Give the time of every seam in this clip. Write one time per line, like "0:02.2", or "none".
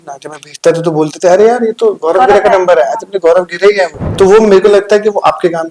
0:04.0